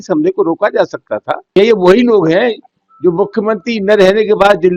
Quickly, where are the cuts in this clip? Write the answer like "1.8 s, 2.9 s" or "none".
1.6 s